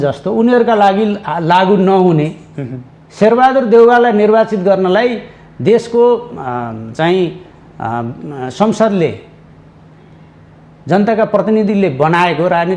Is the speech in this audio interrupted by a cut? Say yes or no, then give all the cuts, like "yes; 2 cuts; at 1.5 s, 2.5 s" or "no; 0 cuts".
no; 0 cuts